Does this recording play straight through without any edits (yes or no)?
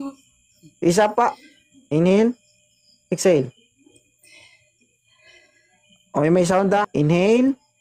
no